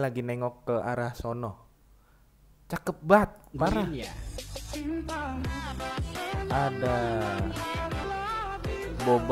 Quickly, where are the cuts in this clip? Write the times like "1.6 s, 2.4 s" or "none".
8.0 s